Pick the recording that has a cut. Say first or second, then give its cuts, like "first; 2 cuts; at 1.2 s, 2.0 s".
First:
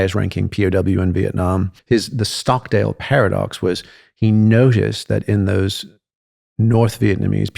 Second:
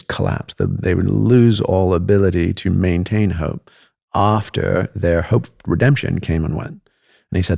first; 1 cut; at 1.8 s